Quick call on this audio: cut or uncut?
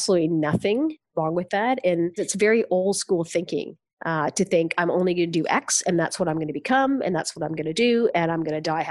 cut